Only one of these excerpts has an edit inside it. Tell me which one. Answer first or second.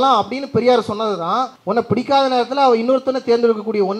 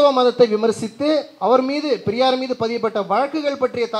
first